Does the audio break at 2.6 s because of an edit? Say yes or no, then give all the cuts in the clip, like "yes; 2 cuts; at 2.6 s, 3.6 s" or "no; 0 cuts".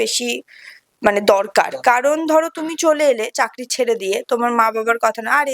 no; 0 cuts